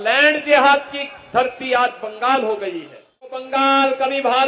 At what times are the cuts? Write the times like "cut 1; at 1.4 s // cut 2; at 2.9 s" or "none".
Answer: cut 1; at 3.4 s